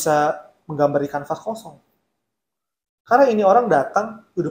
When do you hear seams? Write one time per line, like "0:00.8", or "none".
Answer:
none